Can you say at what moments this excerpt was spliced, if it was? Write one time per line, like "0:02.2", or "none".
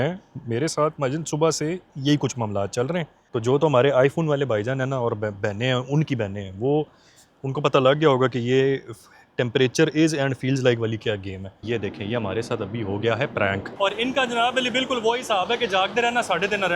0:03.2
0:11.6
0:13.7